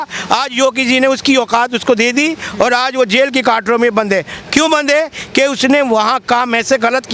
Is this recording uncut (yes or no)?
yes